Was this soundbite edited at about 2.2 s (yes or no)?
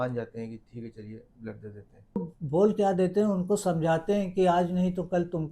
yes